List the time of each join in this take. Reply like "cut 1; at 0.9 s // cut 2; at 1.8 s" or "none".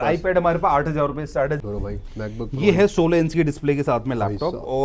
cut 1; at 1.6 s